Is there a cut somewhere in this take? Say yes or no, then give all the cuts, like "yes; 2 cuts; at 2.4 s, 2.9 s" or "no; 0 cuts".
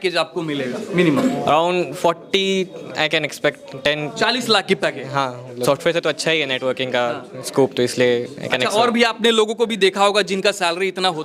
no; 0 cuts